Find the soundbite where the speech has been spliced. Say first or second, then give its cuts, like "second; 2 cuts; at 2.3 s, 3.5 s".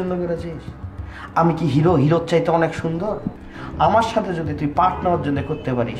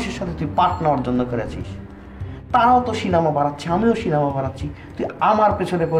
first; 1 cut; at 3.3 s